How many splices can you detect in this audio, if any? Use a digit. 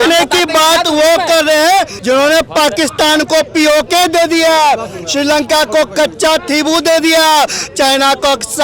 1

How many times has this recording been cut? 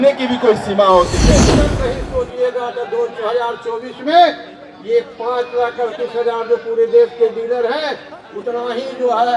1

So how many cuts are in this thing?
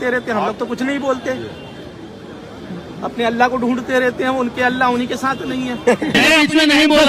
1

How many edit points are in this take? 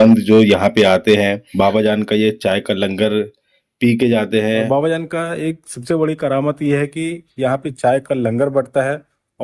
1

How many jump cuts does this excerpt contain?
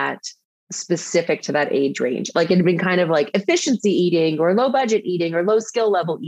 0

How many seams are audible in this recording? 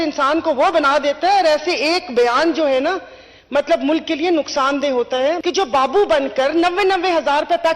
1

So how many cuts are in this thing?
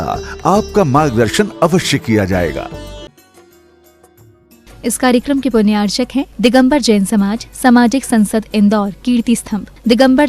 1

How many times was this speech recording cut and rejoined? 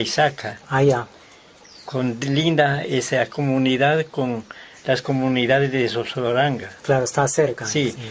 0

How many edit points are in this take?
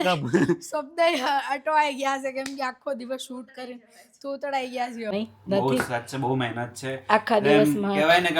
1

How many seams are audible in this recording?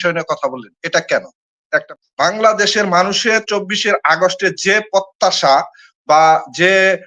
1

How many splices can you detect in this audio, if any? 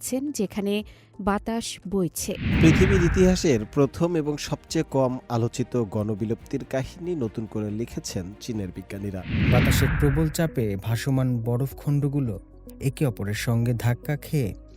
2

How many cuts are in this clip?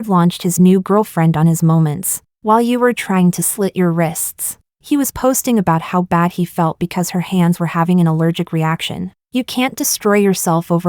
1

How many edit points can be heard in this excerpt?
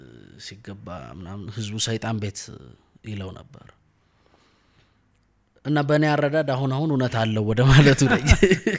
0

